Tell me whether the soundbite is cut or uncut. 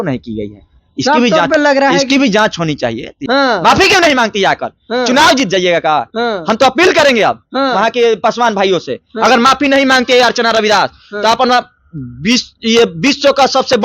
cut